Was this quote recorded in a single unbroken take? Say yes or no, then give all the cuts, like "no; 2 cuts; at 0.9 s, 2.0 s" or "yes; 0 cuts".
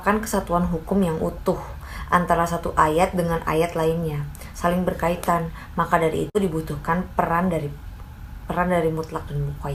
yes; 0 cuts